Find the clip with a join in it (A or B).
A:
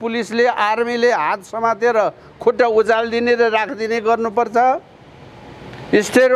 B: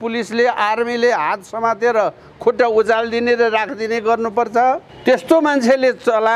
B